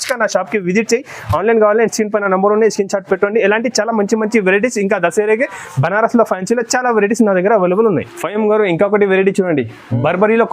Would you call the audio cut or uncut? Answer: cut